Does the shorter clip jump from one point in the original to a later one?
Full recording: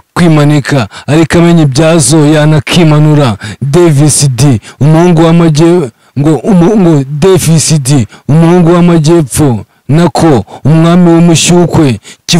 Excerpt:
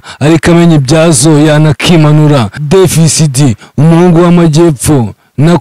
yes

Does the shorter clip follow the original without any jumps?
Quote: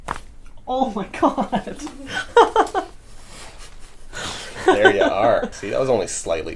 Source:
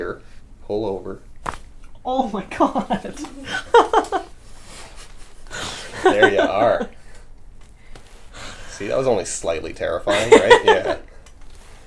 no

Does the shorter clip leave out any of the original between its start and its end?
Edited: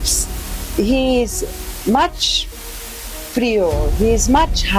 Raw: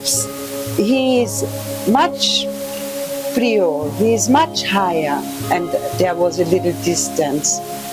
no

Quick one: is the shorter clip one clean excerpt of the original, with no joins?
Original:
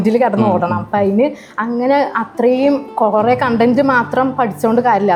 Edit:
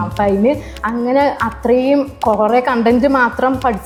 yes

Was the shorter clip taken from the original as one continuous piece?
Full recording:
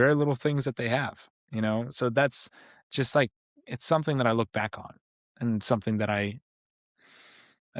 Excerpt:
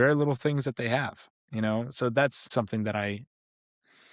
no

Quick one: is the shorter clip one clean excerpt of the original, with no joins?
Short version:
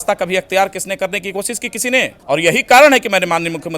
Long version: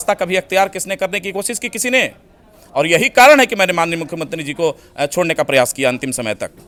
no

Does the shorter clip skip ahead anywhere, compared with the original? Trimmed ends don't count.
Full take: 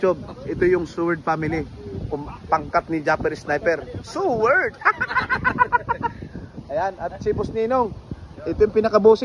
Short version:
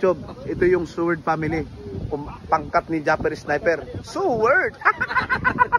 no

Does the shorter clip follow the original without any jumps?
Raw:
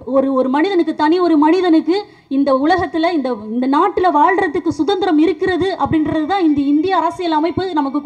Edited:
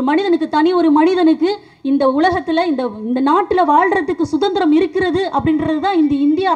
yes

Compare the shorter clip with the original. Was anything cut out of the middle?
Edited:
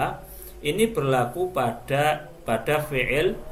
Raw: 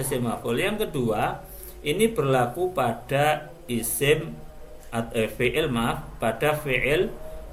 yes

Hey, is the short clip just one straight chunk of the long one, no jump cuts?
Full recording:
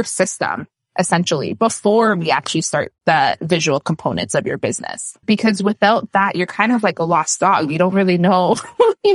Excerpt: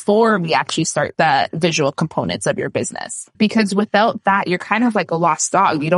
no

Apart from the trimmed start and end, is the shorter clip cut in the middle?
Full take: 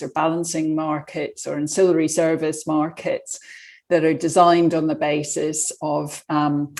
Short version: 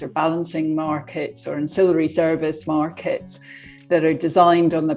no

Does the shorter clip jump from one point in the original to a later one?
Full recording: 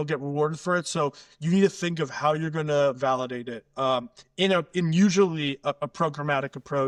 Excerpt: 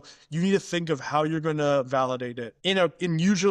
yes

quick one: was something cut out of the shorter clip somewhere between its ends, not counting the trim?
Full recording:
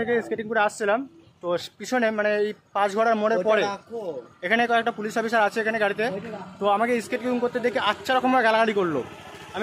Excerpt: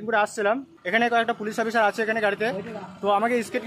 yes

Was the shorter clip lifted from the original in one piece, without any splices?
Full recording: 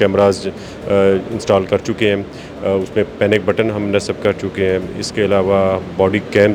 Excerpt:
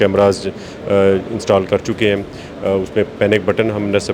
yes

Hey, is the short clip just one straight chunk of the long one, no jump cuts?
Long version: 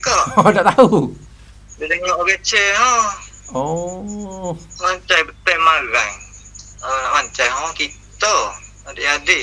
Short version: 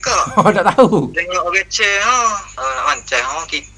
no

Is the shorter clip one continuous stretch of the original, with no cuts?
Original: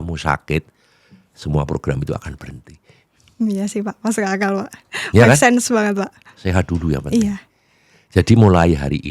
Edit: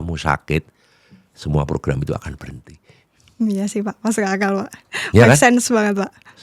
yes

